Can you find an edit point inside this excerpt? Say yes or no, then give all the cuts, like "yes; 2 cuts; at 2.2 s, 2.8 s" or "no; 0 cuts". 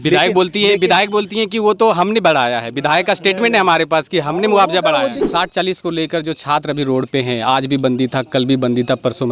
yes; 1 cut; at 5.2 s